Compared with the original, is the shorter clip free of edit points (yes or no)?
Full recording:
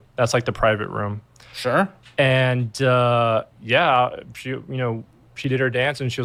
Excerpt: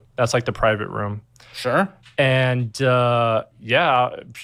yes